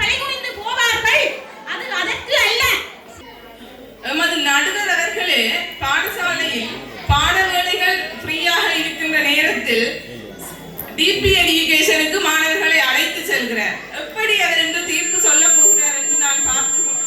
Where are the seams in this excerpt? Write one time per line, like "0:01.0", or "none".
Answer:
0:03.0

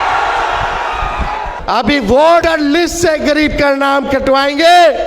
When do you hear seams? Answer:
0:01.5
0:02.4

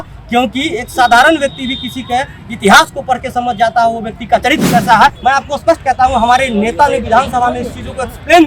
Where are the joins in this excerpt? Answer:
0:05.2

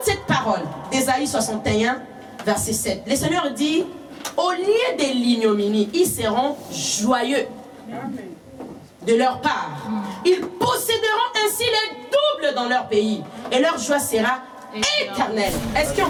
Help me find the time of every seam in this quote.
none

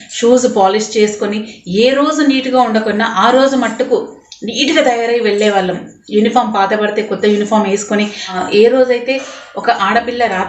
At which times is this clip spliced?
0:08.4

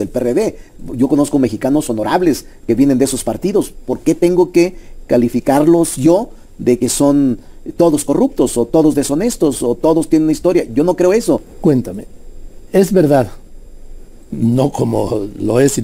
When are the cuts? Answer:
0:11.5

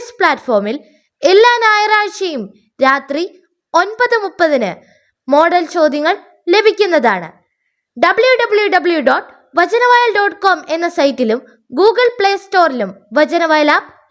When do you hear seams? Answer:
none

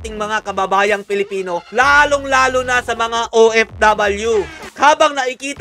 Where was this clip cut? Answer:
0:04.7

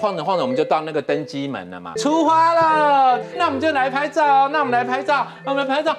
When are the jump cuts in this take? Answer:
0:01.9

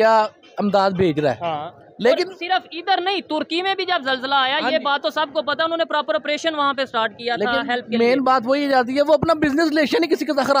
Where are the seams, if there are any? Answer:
none

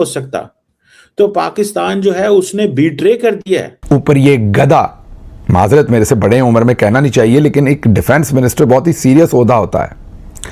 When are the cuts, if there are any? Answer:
0:03.7

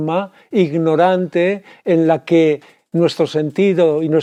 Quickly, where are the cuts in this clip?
none

